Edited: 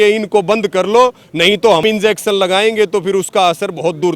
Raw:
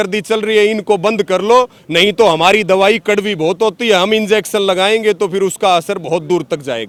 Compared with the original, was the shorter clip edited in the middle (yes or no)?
yes